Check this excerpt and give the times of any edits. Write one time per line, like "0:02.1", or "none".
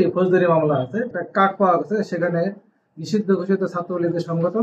0:01.1